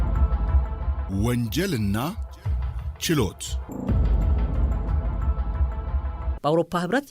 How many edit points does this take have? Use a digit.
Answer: 3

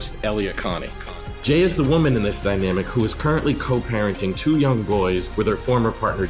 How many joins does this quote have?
0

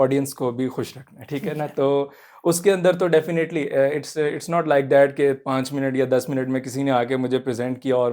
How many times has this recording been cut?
0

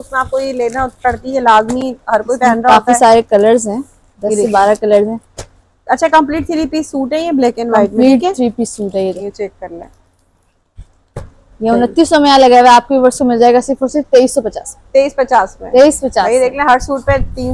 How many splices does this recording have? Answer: 0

